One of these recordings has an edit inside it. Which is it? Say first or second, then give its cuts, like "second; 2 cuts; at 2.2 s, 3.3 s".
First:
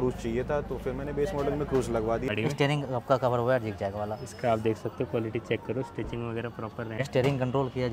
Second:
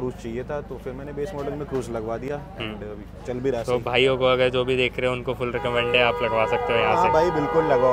first; 2 cuts; at 2.3 s, 6.9 s